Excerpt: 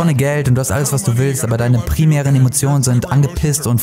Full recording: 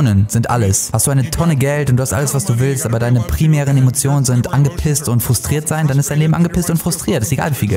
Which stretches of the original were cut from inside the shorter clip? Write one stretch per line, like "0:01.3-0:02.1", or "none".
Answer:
none